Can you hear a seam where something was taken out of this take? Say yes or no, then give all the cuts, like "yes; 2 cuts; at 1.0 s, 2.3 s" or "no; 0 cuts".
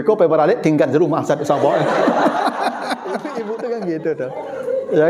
yes; 1 cut; at 3.2 s